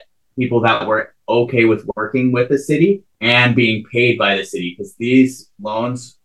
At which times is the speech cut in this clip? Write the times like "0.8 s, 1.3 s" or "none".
3.1 s